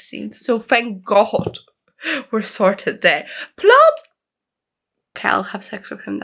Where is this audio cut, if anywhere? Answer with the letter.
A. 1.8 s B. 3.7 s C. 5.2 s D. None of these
C